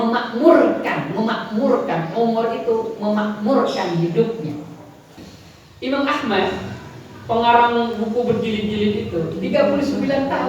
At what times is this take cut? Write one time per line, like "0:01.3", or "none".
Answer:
0:05.1